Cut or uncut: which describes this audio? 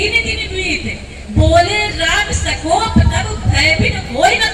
uncut